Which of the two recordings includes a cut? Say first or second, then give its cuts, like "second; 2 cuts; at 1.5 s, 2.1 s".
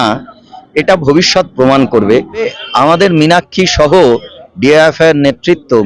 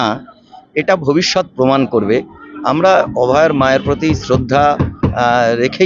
first; 1 cut; at 2.5 s